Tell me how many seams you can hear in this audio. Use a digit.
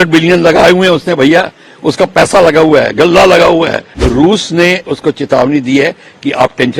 1